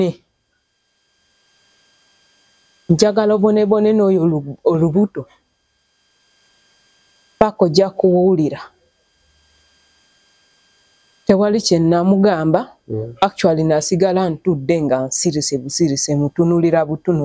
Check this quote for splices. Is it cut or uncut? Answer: uncut